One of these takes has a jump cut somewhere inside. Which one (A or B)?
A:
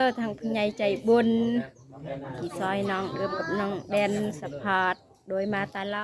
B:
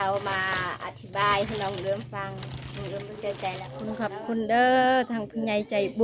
B